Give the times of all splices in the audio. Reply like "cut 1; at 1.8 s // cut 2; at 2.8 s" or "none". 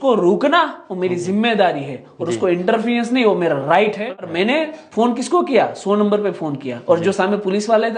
cut 1; at 4.1 s